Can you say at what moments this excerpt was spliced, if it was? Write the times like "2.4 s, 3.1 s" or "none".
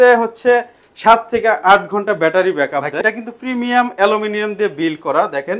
3.0 s